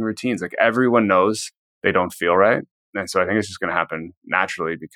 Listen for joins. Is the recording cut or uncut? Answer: uncut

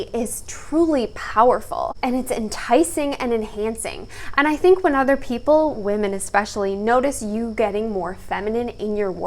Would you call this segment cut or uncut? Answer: uncut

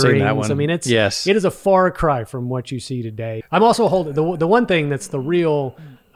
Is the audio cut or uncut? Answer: cut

